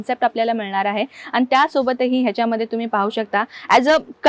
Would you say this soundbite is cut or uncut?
uncut